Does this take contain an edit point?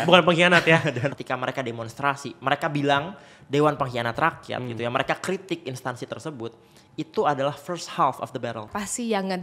yes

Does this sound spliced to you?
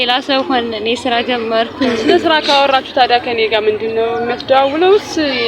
yes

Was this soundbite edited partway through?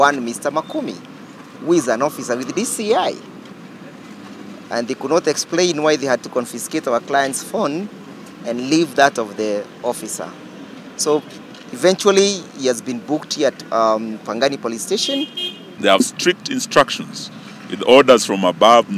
yes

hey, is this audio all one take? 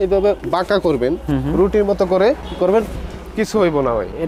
yes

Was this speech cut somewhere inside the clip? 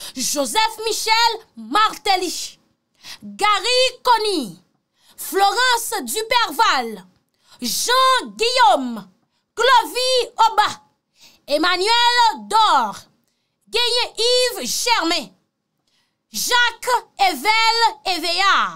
no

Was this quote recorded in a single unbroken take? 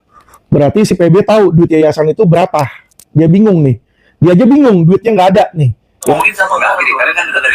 no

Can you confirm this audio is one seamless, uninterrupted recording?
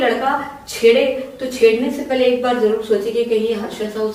yes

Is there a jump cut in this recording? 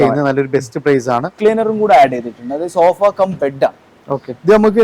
yes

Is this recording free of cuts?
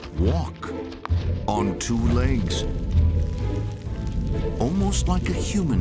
yes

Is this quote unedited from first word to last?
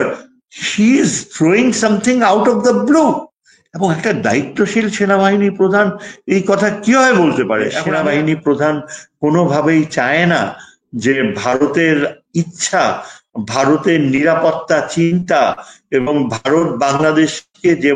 no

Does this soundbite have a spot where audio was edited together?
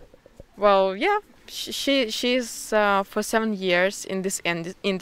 no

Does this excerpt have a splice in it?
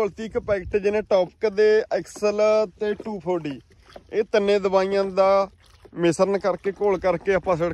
no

